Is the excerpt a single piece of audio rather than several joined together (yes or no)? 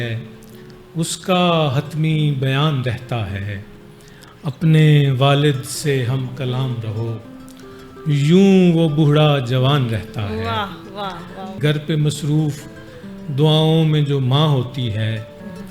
no